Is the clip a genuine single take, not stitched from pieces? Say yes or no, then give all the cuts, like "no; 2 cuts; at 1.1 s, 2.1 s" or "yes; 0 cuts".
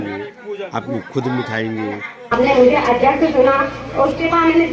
no; 1 cut; at 2.3 s